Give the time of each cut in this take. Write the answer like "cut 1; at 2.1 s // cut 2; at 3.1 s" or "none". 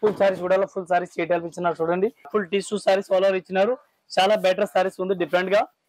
cut 1; at 2.3 s